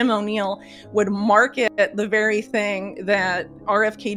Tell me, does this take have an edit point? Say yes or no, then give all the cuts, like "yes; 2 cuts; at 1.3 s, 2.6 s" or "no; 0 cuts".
no; 0 cuts